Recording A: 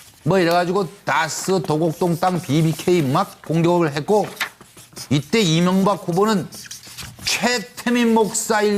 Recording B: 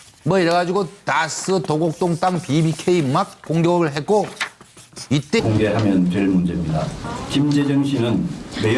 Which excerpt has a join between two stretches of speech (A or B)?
A